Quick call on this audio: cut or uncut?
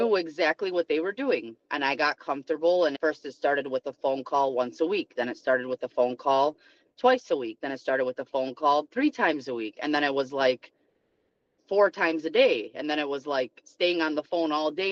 uncut